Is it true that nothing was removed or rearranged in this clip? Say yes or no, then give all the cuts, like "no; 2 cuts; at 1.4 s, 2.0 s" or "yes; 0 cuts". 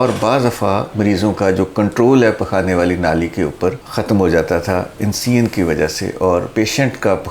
no; 1 cut; at 3.8 s